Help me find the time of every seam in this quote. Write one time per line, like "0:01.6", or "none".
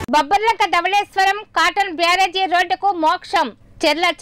none